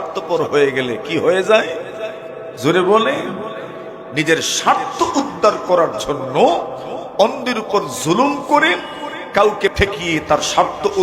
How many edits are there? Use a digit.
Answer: 1